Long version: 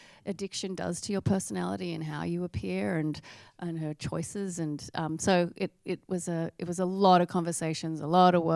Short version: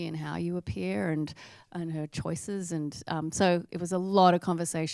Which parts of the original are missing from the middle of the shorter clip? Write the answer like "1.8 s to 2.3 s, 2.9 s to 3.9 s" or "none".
5.5 s to 6.5 s